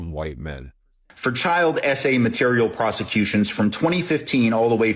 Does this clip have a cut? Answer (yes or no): yes